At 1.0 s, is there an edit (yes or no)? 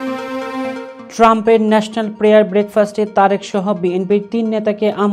yes